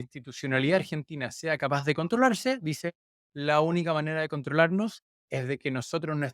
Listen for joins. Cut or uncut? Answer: uncut